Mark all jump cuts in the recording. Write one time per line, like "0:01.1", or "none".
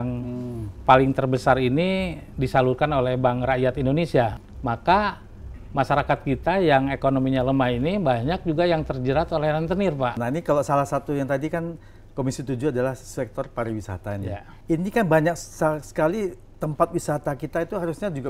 0:04.5
0:10.2
0:14.5